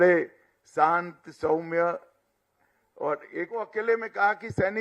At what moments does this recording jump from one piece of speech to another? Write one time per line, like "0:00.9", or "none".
0:03.6